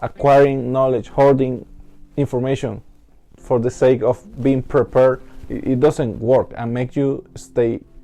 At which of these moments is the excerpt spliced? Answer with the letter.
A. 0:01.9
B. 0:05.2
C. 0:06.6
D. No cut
D